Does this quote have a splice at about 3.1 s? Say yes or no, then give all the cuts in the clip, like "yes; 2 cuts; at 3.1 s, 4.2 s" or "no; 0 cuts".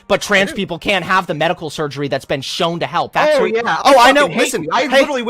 yes; 1 cut; at 3.1 s